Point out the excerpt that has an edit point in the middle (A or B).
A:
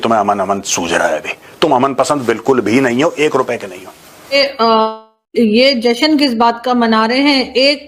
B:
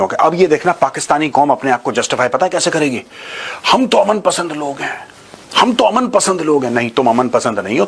A